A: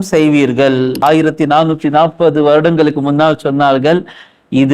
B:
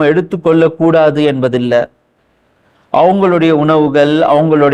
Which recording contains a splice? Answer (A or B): A